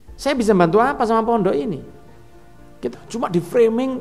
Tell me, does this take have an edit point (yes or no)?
yes